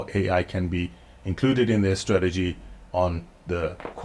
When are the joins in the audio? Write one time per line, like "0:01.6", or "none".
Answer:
none